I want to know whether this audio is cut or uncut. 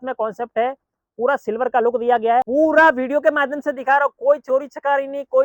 cut